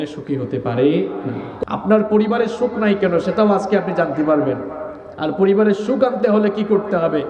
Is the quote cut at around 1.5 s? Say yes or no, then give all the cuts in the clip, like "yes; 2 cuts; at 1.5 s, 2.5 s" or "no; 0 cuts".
yes; 1 cut; at 1.5 s